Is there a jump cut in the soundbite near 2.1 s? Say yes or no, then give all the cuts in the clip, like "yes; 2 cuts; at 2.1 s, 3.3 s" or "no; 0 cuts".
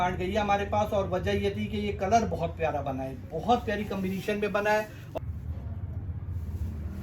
no; 1 cut; at 5.0 s